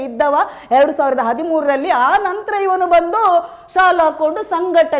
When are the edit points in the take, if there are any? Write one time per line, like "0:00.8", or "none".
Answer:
none